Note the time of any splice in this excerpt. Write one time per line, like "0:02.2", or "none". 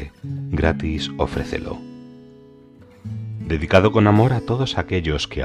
0:01.8
0:03.5